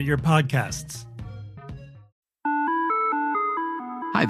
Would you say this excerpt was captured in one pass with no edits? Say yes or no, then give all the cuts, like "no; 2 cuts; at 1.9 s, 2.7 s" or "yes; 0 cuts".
no; 1 cut; at 2.1 s